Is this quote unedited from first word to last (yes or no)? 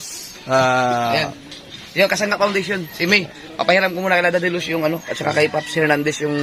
yes